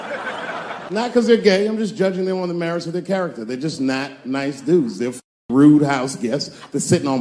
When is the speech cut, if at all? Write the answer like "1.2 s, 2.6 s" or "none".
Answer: 1.0 s